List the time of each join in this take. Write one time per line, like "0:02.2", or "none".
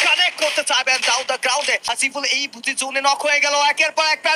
0:01.9